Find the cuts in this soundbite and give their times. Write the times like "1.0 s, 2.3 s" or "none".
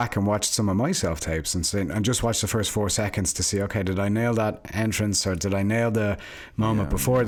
none